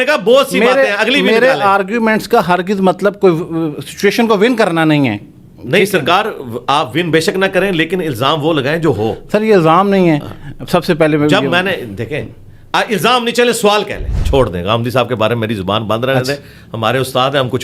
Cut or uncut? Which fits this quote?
cut